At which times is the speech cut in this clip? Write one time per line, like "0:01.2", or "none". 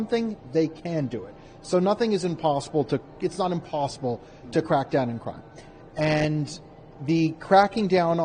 none